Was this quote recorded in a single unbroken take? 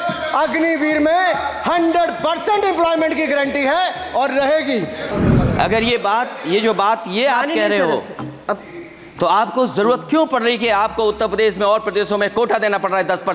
no; 1 cut; at 5.1 s

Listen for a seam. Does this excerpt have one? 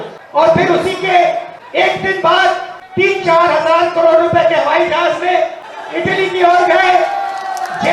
yes; 1 cut; at 5.6 s

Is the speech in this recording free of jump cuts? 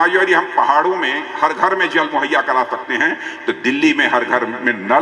yes; 0 cuts

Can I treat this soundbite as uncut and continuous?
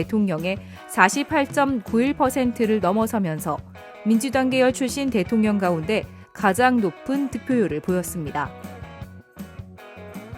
no; 1 cut; at 8.5 s

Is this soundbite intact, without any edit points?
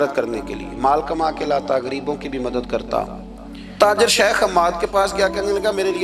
no; 1 cut; at 3.8 s

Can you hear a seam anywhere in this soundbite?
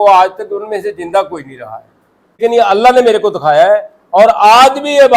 yes; 1 cut; at 2.4 s

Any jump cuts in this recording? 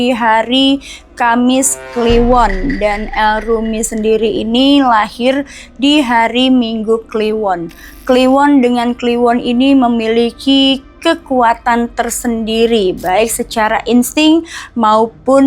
no; 0 cuts

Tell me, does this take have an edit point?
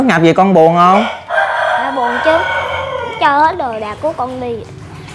no; 0 cuts

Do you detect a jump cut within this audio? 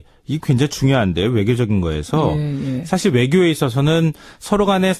yes; 1 cut; at 3.3 s

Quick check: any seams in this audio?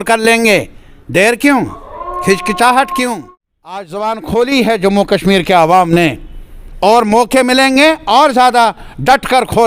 yes; 1 cut; at 3.9 s

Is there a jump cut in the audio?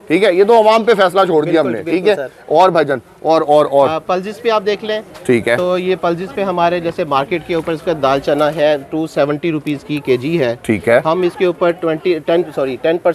no; 0 cuts

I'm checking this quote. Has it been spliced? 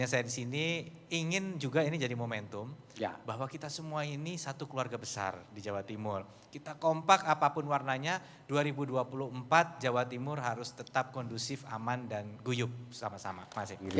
no; 0 cuts

